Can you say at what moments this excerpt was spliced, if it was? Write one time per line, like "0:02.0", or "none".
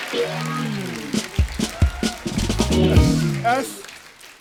none